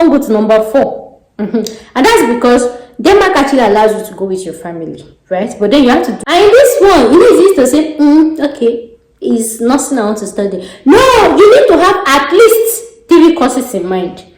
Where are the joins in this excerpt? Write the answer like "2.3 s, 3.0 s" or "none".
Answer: 6.2 s